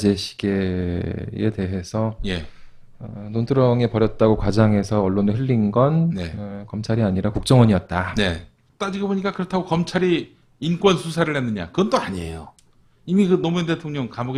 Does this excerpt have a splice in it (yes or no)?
yes